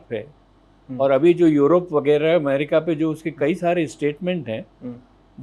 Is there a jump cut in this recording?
no; 0 cuts

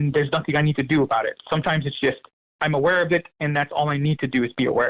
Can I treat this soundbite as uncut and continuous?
yes; 0 cuts

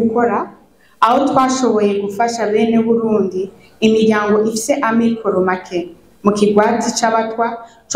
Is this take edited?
no; 0 cuts

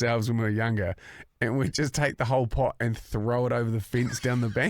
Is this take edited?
no; 0 cuts

